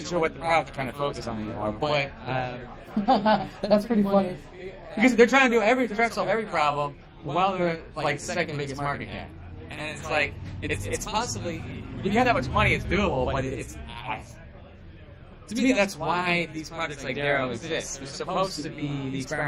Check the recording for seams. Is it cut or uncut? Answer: uncut